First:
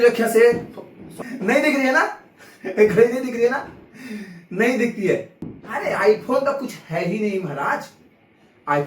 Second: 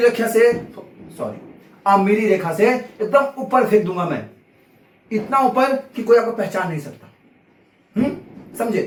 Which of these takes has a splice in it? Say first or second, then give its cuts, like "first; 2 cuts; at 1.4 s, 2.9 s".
first; 2 cuts; at 1.3 s, 5.3 s